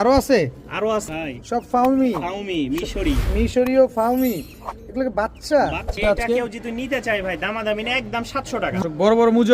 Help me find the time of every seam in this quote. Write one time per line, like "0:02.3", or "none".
0:01.1
0:05.9
0:08.8